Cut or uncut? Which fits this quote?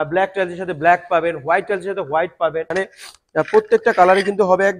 cut